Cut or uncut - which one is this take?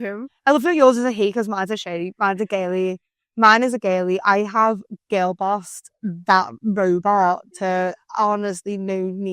uncut